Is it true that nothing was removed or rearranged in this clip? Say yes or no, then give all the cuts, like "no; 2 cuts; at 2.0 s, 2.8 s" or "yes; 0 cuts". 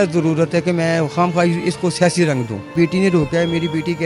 no; 1 cut; at 2.7 s